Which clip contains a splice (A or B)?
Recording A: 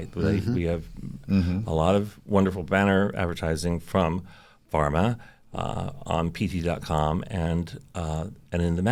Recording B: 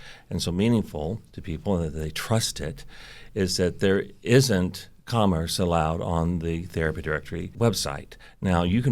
B